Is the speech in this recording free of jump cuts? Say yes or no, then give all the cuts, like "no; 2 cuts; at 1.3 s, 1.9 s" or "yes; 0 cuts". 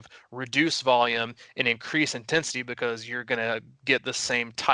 yes; 0 cuts